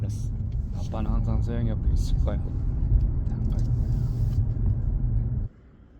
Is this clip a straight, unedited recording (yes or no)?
yes